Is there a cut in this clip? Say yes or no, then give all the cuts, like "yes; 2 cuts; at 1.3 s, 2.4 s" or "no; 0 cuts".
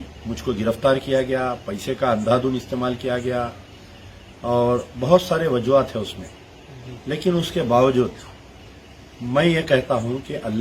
no; 0 cuts